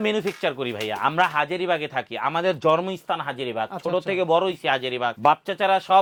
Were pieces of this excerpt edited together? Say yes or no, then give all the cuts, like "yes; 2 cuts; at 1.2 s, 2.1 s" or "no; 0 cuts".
no; 0 cuts